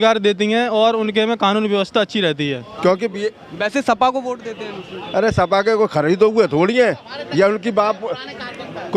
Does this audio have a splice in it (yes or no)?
yes